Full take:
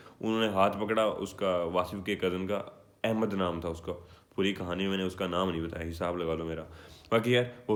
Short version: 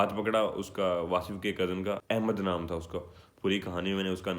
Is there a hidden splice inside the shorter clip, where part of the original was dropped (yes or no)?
yes